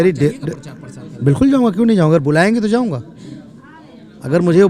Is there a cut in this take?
no; 0 cuts

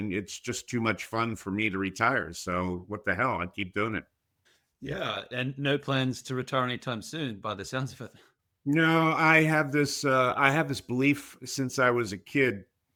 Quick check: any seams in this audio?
no; 0 cuts

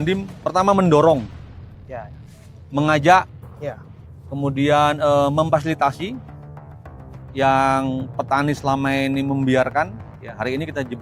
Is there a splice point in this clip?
no; 0 cuts

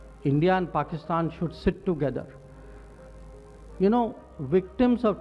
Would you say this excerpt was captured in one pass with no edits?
yes; 0 cuts

